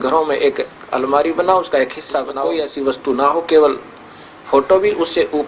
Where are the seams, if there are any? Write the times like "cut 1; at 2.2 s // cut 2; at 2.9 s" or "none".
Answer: cut 1; at 2.4 s